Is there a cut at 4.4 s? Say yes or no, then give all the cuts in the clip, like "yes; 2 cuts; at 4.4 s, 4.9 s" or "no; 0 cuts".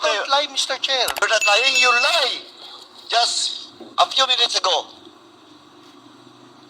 no; 1 cut; at 1.2 s